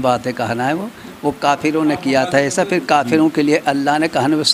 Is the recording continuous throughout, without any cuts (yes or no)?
yes